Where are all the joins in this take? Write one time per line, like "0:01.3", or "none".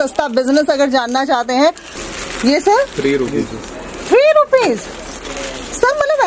0:01.9